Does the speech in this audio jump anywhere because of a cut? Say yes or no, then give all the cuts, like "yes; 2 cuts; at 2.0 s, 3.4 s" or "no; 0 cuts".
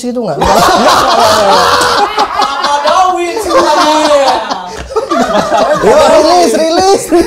no; 0 cuts